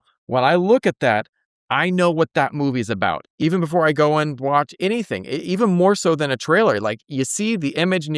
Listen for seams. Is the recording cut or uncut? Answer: cut